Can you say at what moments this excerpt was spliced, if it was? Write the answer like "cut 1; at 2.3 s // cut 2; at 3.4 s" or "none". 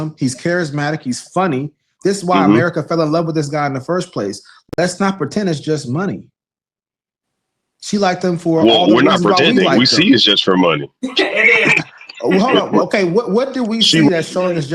none